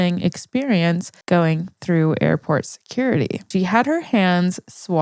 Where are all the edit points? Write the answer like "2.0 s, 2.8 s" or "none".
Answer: 1.1 s, 3.5 s